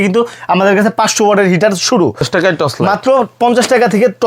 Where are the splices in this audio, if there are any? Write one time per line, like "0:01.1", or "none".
0:02.3